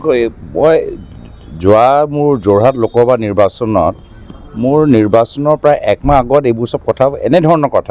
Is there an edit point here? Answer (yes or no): no